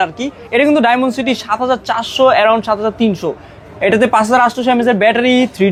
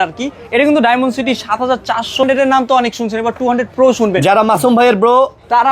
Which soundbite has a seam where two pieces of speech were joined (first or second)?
second